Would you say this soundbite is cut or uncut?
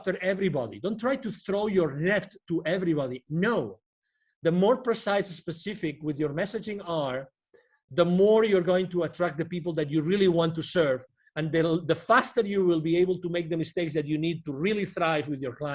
uncut